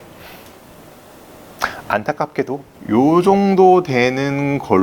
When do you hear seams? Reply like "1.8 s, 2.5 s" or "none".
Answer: 2.7 s